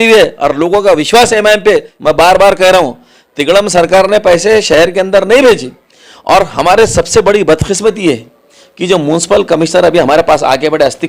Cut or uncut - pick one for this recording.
cut